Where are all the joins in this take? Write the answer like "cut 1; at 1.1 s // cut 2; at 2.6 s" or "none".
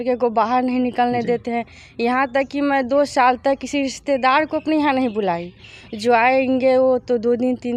none